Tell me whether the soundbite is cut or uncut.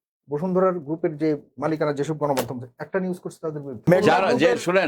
cut